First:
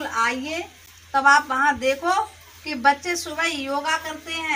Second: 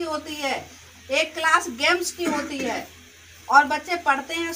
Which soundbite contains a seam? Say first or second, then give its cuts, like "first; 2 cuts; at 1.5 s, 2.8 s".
first; 1 cut; at 0.9 s